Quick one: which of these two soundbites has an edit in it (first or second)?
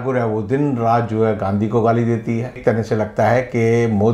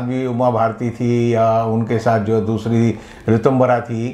first